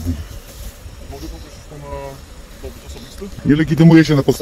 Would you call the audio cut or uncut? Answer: cut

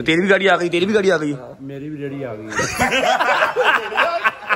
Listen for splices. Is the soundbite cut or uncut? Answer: cut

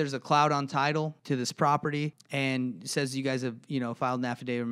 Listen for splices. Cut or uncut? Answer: cut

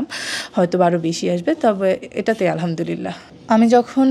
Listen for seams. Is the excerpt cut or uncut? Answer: uncut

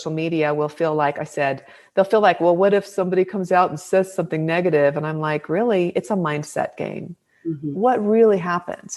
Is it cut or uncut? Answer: uncut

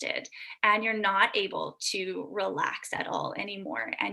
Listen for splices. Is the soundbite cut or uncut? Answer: uncut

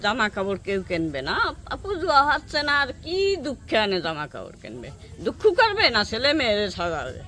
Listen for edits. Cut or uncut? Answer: uncut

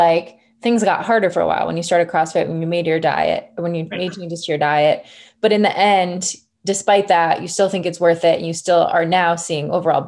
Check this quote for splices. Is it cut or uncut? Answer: uncut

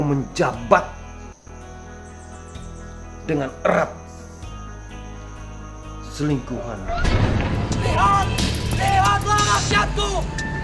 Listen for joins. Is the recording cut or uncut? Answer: cut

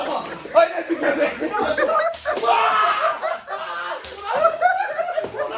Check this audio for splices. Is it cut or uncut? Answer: uncut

